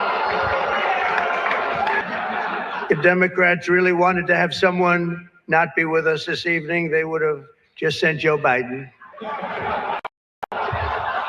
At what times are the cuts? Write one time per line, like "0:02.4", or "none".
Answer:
0:02.0